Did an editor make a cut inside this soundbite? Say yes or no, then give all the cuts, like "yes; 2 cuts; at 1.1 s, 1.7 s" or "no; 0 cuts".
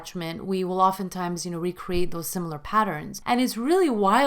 yes; 1 cut; at 3.1 s